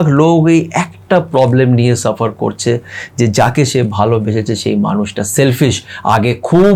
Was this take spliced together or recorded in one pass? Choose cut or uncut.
uncut